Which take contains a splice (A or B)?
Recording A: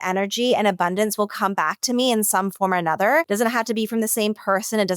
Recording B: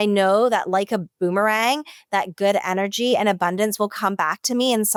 A